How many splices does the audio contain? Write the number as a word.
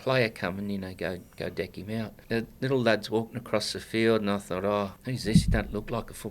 two